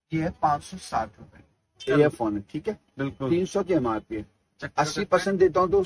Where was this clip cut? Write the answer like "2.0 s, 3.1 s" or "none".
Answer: 1.8 s

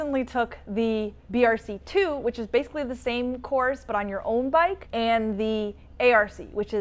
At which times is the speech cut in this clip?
1.2 s, 4.8 s

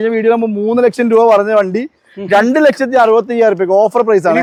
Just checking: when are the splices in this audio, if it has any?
none

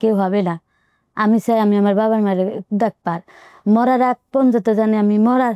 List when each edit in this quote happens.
none

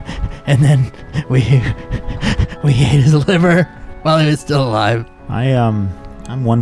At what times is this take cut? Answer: 5.2 s

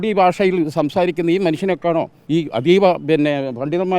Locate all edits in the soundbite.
2.2 s

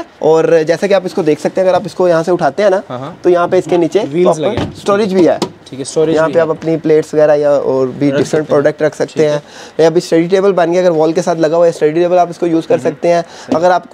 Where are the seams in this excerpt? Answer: none

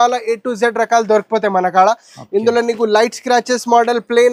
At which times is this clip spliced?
none

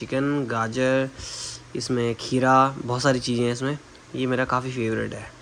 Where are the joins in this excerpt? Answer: none

